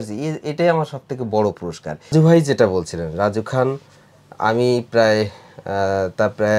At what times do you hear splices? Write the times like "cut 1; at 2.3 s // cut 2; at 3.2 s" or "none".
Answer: cut 1; at 2.1 s